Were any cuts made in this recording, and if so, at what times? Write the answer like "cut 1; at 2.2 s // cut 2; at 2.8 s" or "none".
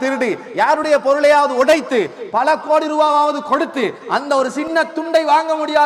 none